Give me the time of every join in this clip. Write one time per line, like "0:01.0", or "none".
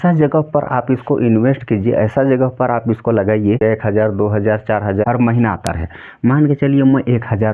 0:03.6
0:05.0